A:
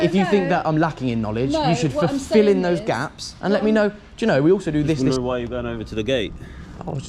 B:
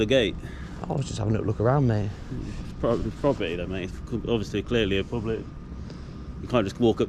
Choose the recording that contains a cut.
A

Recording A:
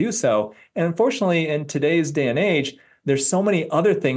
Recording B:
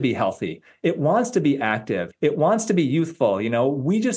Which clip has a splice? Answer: B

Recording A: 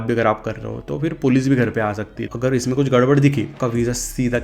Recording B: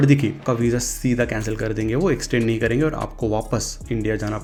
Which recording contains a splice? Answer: A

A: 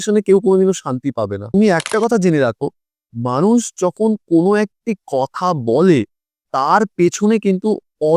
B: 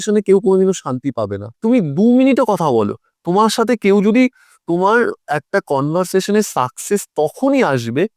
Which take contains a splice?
A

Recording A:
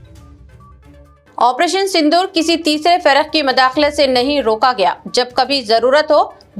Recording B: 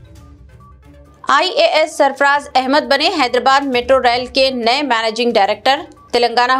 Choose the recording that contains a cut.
A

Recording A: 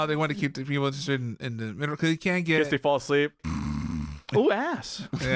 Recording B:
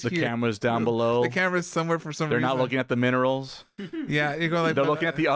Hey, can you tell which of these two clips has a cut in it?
A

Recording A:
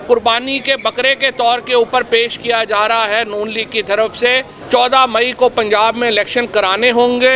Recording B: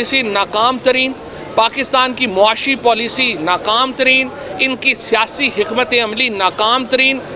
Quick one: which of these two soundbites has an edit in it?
A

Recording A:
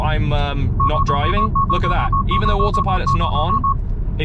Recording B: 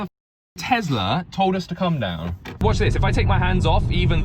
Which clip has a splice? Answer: B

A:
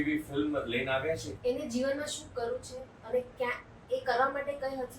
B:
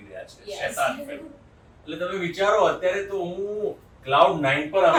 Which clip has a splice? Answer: A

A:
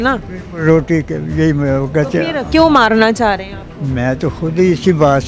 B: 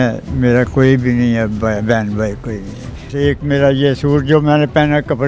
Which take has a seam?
B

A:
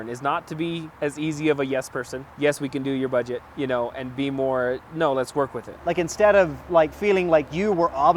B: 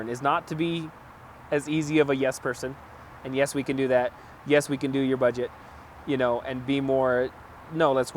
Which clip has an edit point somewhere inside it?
A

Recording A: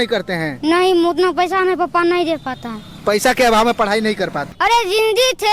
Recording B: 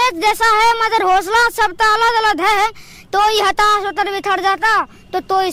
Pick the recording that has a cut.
A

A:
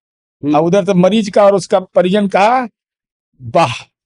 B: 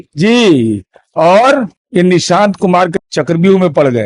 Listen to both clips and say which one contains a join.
B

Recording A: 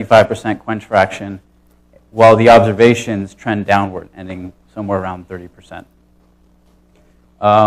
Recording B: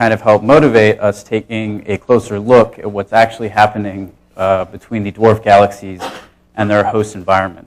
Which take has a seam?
A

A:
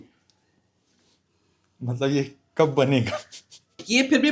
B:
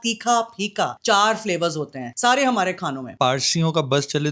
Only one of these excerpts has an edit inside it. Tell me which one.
B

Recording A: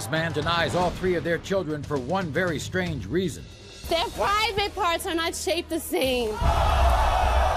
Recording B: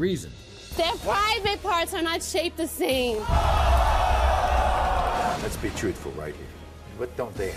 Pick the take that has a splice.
B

